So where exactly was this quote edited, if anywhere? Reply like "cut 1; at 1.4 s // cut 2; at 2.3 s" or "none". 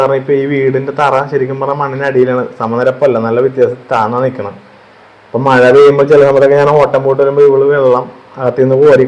none